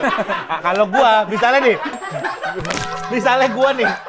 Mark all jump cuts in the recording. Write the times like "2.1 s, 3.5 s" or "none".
none